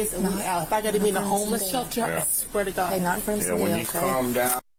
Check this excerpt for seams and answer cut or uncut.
uncut